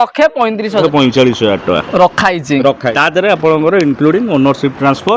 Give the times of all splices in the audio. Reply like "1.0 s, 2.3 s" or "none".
0.8 s, 2.9 s